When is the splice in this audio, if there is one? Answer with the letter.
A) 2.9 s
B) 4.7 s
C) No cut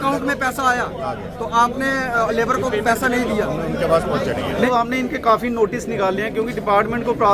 B